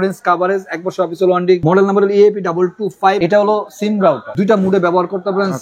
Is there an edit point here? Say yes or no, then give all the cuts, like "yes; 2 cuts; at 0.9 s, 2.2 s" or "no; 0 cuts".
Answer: yes; 3 cuts; at 1.6 s, 3.2 s, 4.3 s